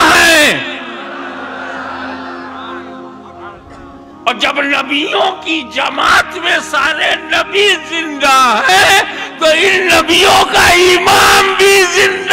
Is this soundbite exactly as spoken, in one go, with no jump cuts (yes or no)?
yes